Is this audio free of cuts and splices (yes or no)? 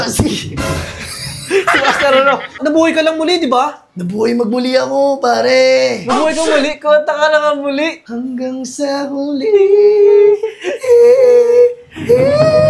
no